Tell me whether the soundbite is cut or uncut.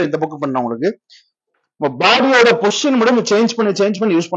uncut